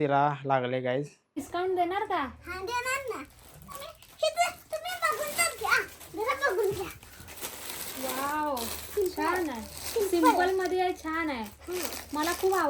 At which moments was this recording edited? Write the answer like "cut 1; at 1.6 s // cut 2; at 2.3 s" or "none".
cut 1; at 1.4 s